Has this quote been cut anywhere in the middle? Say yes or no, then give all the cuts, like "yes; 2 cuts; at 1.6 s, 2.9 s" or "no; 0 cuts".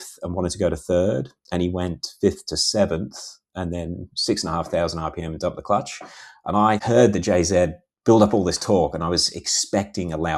yes; 1 cut; at 6.8 s